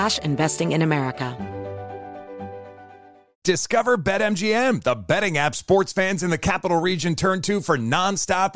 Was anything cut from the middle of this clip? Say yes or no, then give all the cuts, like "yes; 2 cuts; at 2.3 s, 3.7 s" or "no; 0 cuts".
yes; 1 cut; at 1.3 s